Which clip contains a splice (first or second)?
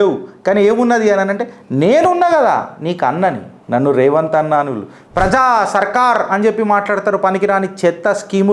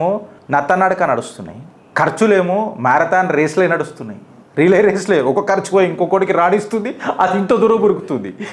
first